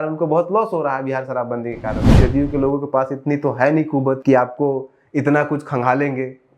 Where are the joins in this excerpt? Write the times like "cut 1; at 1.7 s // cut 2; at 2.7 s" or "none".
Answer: cut 1; at 2.1 s // cut 2; at 4.2 s